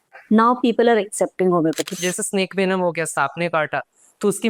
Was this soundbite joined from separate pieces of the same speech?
yes; 1 cut; at 1.9 s

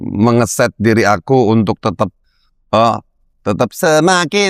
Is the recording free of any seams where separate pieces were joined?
yes; 0 cuts

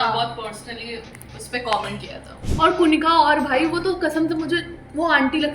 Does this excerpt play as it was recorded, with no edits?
no; 1 cut; at 2.4 s

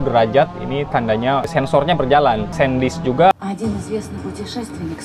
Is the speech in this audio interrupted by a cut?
yes; 1 cut; at 3.3 s

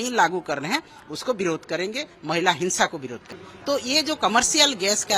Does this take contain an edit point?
yes; 1 cut; at 3.5 s

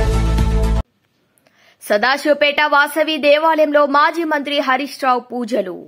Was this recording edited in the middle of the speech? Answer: yes; 1 cut; at 0.9 s

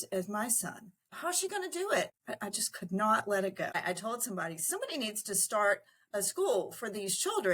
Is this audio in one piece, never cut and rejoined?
no; 3 cuts; at 1.1 s, 2.1 s, 3.7 s

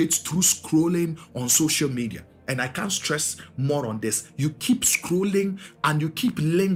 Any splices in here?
no; 0 cuts

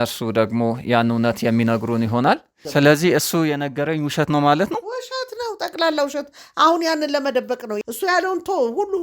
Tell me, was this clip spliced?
yes; 2 cuts; at 2.5 s, 7.7 s

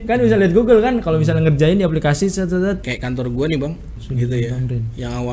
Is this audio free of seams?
no; 2 cuts; at 2.9 s, 4.0 s

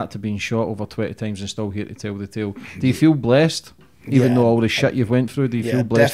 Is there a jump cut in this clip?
no; 0 cuts

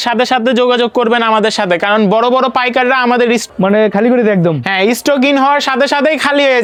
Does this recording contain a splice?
no; 0 cuts

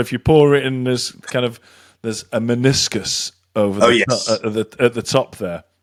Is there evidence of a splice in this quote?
no; 0 cuts

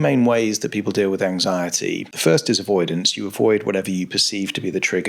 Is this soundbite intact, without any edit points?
no; 1 cut; at 2.1 s

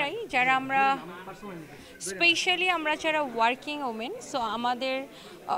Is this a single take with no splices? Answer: yes; 0 cuts

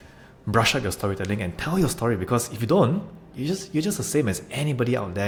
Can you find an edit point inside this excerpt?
no; 0 cuts

